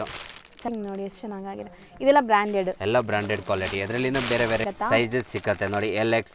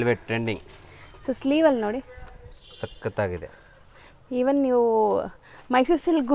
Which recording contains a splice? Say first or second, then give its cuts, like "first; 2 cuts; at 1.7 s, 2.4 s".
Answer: first; 2 cuts; at 0.7 s, 4.7 s